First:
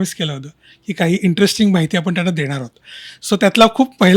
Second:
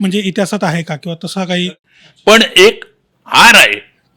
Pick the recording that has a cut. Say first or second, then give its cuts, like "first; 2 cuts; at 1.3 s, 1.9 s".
second; 1 cut; at 1.7 s